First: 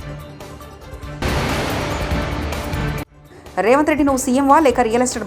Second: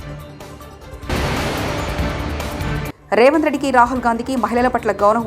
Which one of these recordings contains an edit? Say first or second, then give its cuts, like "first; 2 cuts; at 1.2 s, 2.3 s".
first; 2 cuts; at 1.1 s, 3.1 s